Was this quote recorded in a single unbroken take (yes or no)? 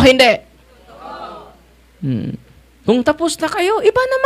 yes